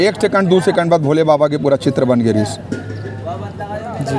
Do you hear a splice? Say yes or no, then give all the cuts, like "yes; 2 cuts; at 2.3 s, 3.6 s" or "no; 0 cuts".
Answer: no; 0 cuts